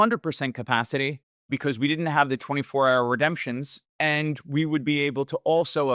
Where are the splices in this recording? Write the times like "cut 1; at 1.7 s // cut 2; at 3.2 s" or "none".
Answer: cut 1; at 1.3 s // cut 2; at 3.8 s